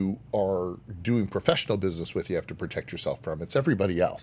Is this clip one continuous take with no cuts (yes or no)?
yes